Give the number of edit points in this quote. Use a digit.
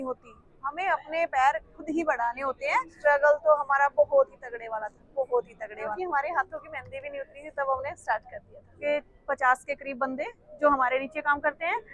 3